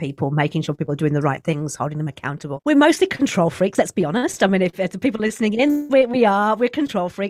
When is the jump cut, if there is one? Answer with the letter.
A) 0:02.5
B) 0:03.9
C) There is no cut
A